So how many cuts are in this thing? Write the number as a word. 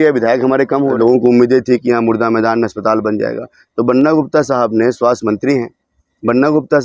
one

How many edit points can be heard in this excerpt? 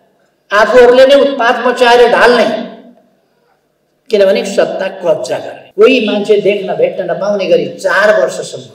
one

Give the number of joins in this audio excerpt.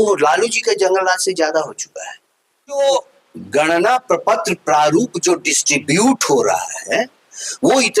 one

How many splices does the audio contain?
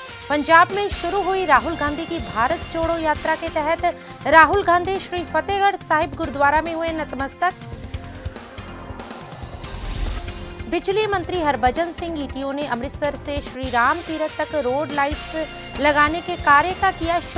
one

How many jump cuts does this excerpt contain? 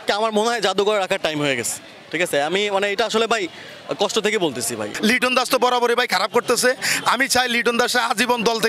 one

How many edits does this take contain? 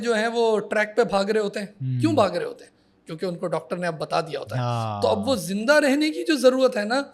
zero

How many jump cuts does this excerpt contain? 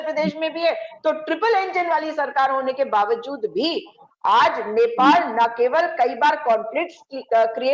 zero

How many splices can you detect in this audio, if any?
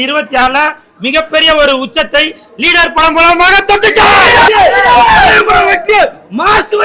one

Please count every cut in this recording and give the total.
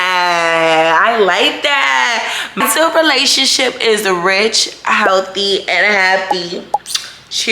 one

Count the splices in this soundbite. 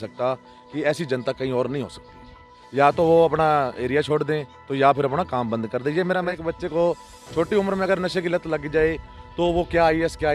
two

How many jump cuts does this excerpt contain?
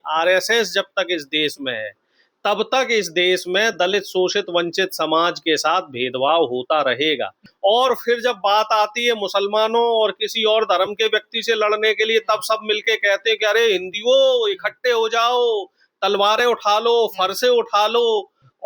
one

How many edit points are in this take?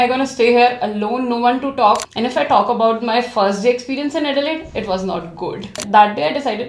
two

